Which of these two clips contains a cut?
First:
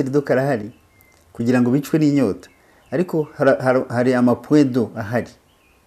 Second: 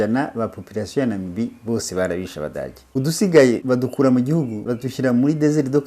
second; 3 cuts; at 2.8 s, 3.6 s, 4.7 s

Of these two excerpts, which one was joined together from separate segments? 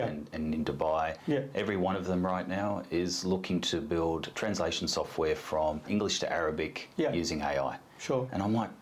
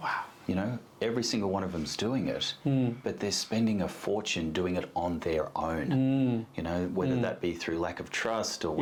first; 3 cuts; at 1.2 s, 4.3 s, 5.9 s

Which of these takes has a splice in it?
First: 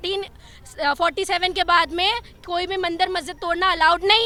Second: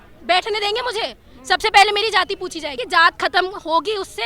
second; 1 cut; at 2.8 s

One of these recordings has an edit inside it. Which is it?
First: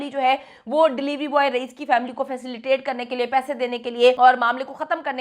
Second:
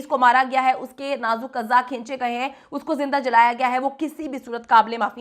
first; 1 cut; at 4.2 s

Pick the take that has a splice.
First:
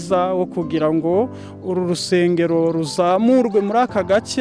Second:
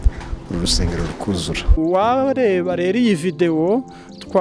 second; 1 cut; at 1.6 s

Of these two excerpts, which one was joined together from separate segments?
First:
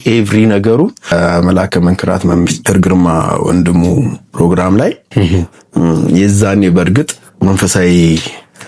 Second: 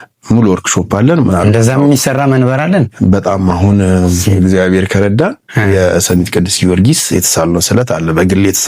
first; 1 cut; at 1.1 s

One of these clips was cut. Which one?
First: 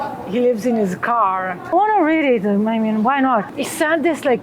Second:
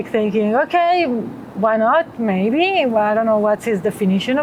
first; 2 cuts; at 1.7 s, 3.5 s

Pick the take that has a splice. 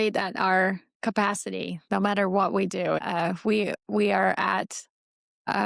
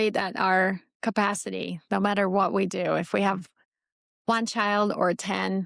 first; 1 cut; at 3.0 s

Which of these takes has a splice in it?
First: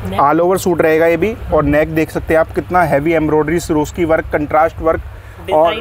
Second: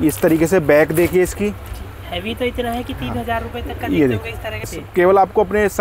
second; 1 cut; at 4.7 s

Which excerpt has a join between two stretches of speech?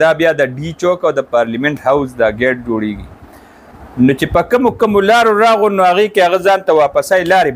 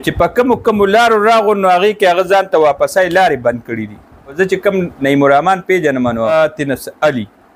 second; 2 cuts; at 4.4 s, 6.3 s

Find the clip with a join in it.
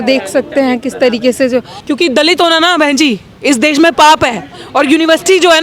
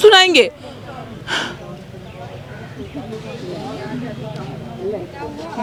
first; 1 cut; at 1.7 s

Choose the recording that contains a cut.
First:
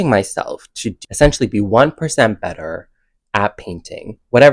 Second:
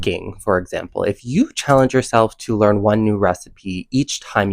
first; 1 cut; at 0.9 s

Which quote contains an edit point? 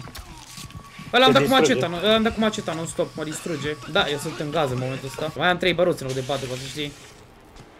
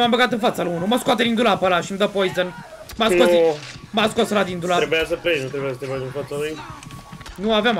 first; 2 cuts; at 3.8 s, 5.3 s

